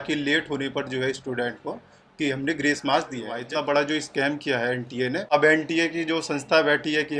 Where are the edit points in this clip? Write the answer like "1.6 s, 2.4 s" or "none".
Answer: 3.4 s, 5.2 s